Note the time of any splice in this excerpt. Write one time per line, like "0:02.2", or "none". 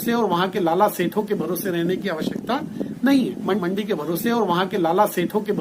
0:03.6

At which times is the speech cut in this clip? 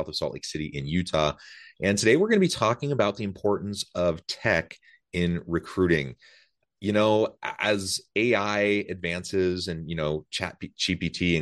none

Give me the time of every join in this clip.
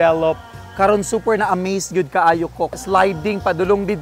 0:02.8

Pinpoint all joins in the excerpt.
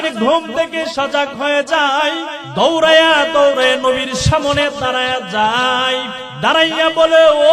0:02.4
0:06.2

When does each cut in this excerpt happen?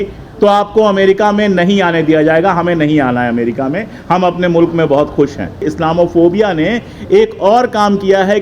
0:05.7

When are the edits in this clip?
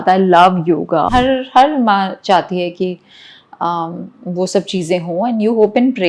0:01.1

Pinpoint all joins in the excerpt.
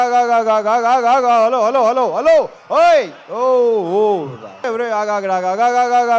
0:04.7

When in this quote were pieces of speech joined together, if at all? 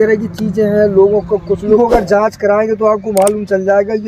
0:01.8

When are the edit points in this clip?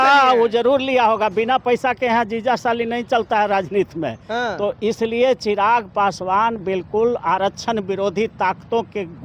none

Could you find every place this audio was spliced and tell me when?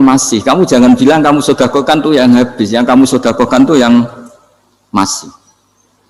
none

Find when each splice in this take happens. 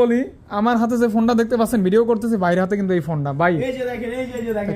none

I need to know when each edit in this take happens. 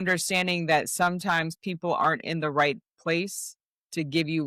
none

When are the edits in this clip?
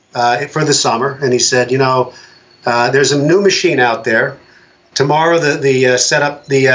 none

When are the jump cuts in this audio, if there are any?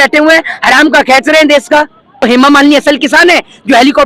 0:02.2

